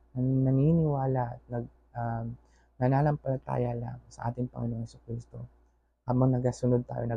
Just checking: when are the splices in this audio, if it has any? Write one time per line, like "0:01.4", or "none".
none